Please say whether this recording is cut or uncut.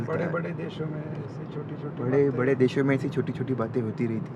uncut